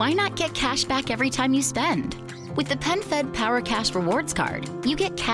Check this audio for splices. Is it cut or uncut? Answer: uncut